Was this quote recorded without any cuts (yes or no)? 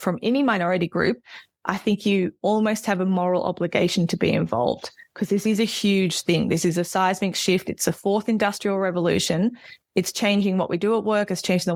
yes